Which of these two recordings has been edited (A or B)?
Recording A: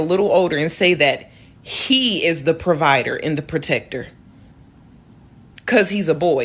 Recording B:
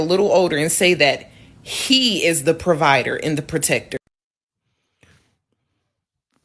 A